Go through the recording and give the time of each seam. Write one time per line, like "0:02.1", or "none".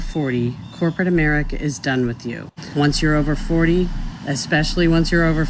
0:02.5